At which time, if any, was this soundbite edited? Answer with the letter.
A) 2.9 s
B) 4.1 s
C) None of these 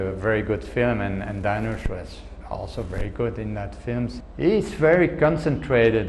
B